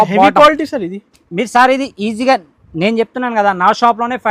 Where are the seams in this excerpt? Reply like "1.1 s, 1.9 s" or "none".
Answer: none